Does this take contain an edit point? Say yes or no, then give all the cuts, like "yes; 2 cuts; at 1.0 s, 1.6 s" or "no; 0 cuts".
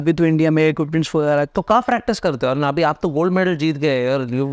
no; 0 cuts